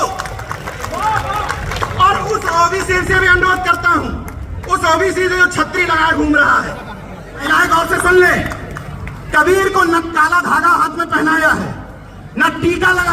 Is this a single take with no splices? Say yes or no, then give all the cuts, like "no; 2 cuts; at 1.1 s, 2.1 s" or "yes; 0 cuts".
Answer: no; 1 cut; at 7.4 s